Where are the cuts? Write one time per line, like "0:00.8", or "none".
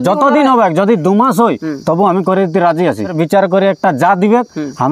0:03.1